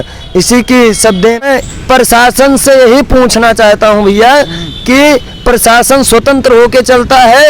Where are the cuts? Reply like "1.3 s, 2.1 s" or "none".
1.4 s